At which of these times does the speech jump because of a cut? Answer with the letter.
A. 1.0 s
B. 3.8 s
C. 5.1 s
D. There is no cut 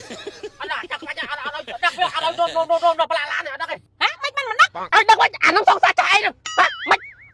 B